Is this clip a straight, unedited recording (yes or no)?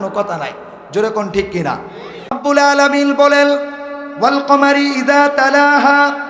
no